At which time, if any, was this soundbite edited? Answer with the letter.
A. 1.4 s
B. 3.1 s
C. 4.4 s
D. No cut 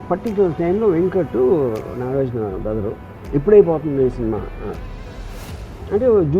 B